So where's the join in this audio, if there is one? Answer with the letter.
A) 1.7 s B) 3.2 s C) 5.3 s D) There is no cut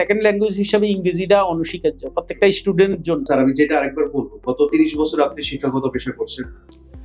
B